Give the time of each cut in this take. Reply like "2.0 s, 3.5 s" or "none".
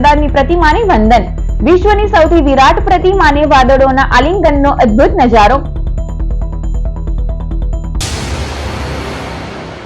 8.0 s